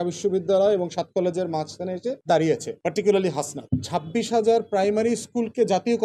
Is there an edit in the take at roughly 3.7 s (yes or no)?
yes